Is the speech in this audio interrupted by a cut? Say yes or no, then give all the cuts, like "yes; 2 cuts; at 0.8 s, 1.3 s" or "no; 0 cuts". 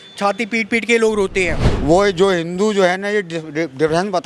yes; 1 cut; at 1.7 s